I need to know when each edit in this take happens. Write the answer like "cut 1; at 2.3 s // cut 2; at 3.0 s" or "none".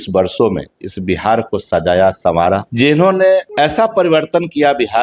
cut 1; at 2.7 s // cut 2; at 3.5 s